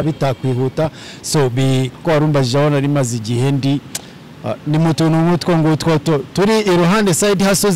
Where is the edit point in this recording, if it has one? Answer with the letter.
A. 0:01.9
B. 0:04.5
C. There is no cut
A